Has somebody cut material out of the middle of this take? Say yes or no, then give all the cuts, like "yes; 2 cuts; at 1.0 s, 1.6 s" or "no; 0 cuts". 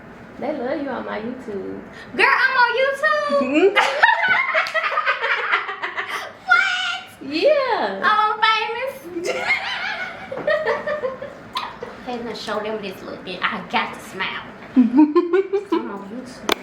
no; 0 cuts